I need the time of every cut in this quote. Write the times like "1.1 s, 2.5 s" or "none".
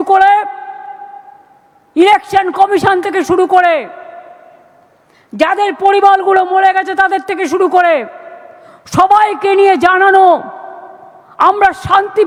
none